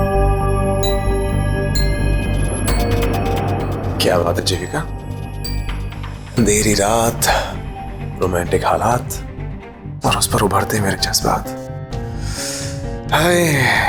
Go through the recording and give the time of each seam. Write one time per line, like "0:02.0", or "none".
none